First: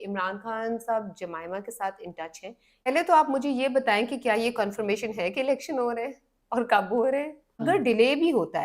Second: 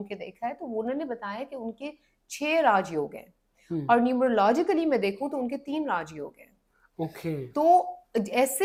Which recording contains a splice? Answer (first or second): first